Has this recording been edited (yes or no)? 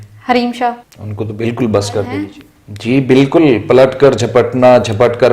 yes